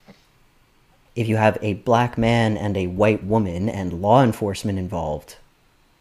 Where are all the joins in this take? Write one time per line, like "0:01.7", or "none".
0:01.0